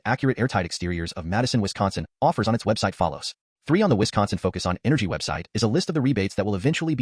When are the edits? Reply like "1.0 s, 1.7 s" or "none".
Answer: 3.4 s

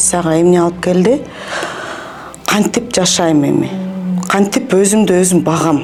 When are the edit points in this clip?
none

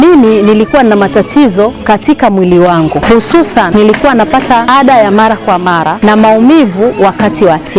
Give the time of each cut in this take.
3.7 s, 4.7 s, 5.9 s

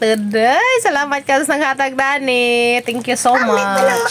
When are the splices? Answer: none

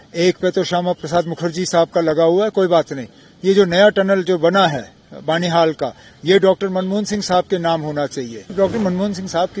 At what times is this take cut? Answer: 8.5 s

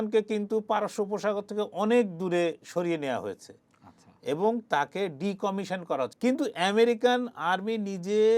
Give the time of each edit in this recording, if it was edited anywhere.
6.1 s

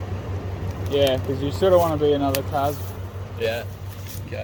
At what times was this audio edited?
none

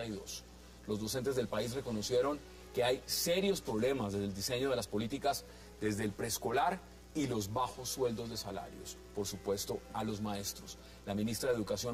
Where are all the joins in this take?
none

